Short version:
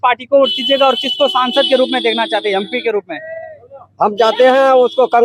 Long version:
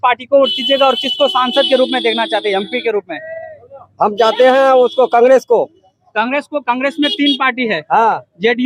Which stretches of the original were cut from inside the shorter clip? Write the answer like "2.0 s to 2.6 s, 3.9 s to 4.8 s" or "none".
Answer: none